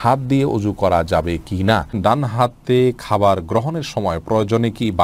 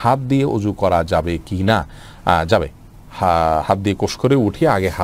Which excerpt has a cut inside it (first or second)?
first